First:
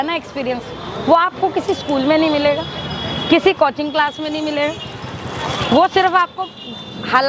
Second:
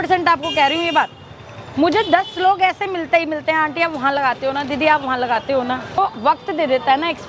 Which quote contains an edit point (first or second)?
second